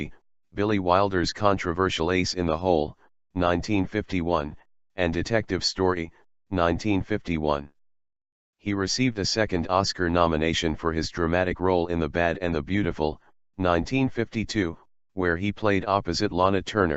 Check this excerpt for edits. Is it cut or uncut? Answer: cut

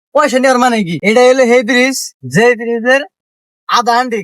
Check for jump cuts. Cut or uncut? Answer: cut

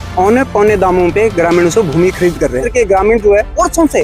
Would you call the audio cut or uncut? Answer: cut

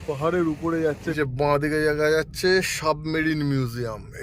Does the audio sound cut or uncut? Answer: cut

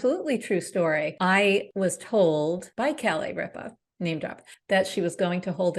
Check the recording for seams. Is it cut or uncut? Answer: cut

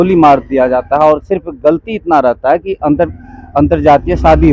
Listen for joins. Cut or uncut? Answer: uncut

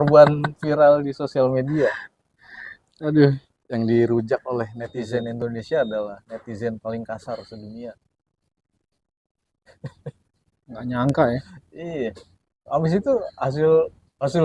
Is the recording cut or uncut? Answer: cut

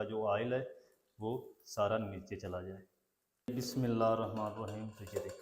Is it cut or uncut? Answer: cut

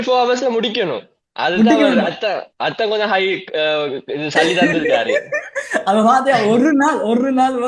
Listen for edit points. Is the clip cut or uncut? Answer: uncut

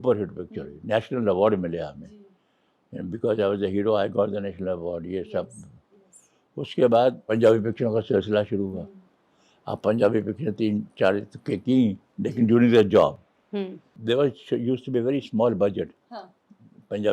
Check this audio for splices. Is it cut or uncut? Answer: uncut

